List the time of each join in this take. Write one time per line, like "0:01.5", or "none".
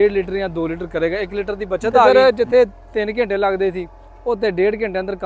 none